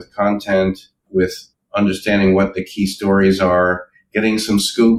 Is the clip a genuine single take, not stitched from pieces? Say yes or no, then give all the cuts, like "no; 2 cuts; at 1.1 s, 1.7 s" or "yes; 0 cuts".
no; 1 cut; at 0.9 s